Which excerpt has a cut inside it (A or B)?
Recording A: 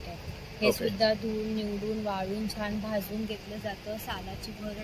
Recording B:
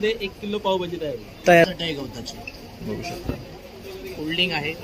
B